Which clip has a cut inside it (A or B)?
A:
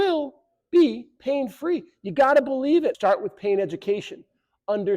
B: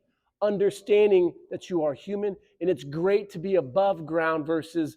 A